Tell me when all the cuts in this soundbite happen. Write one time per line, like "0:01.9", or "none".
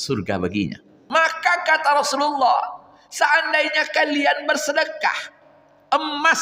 0:01.0